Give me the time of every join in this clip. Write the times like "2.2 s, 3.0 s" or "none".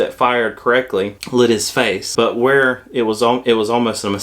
1.2 s, 2.1 s